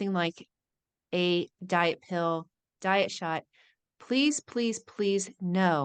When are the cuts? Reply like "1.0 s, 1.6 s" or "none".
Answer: none